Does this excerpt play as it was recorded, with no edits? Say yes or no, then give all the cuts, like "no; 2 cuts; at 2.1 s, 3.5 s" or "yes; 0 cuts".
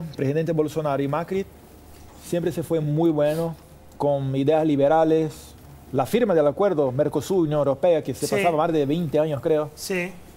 yes; 0 cuts